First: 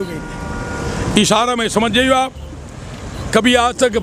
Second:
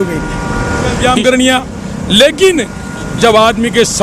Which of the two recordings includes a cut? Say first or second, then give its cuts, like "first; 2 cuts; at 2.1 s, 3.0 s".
second; 1 cut; at 1.0 s